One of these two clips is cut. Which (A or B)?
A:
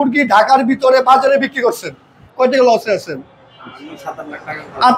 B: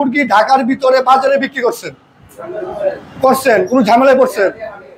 A